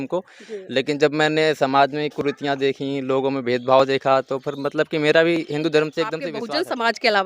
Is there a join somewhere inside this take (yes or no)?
yes